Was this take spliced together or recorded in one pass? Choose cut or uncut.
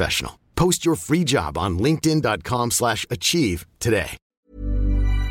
cut